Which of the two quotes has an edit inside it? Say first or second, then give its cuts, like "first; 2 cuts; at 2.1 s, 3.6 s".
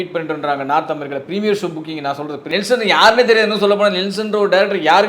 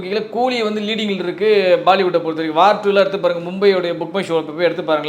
first; 1 cut; at 2.4 s